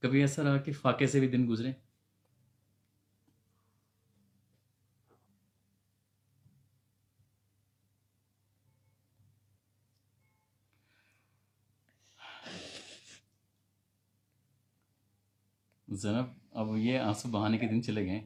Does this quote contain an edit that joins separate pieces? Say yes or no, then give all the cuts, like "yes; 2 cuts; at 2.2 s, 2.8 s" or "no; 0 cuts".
no; 0 cuts